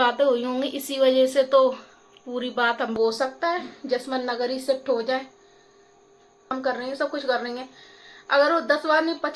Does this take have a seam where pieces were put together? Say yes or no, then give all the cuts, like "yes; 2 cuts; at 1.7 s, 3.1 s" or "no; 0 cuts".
yes; 2 cuts; at 2.9 s, 6.6 s